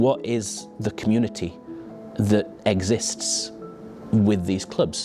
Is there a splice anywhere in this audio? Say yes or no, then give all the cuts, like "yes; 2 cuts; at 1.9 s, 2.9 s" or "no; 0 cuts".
no; 0 cuts